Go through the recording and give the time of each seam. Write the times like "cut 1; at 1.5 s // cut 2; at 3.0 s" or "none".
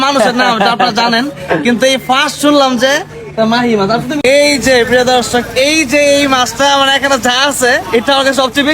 cut 1; at 4.2 s